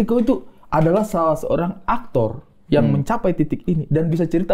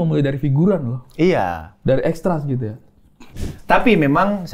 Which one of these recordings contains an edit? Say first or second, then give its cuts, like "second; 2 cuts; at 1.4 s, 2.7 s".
second; 1 cut; at 3.3 s